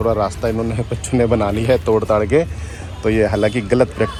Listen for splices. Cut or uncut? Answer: uncut